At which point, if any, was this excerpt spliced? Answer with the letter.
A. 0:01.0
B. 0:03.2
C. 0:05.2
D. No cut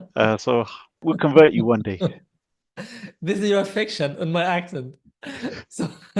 A